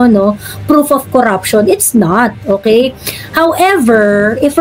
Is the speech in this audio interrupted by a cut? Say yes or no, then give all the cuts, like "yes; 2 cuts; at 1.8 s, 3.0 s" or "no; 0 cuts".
no; 0 cuts